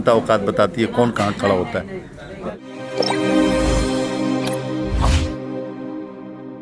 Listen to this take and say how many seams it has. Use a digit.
1